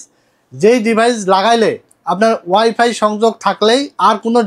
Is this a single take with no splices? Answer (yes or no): yes